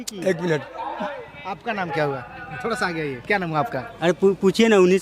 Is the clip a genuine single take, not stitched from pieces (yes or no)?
yes